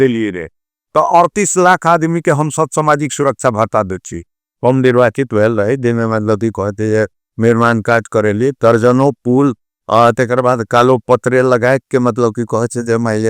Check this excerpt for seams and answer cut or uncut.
cut